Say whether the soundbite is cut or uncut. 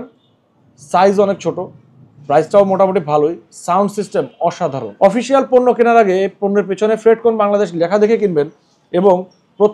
cut